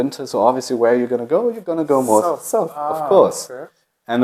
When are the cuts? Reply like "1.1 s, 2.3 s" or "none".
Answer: none

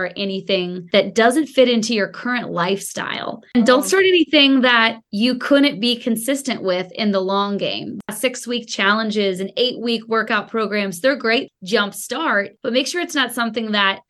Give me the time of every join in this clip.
none

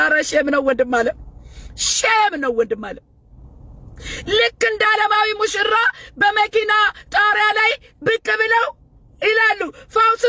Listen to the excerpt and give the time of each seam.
none

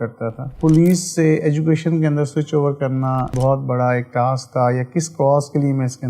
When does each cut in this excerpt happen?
3.3 s

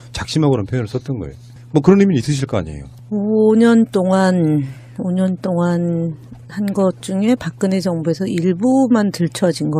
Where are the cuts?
none

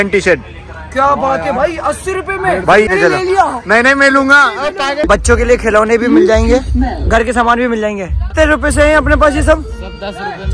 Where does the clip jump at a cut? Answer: 2.9 s, 5.0 s, 8.3 s

